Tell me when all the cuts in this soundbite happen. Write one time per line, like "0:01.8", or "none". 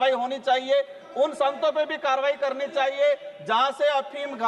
none